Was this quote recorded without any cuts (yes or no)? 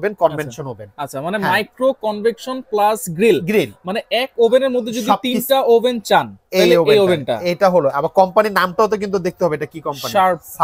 yes